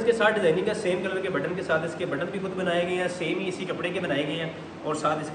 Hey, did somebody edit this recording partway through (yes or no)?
no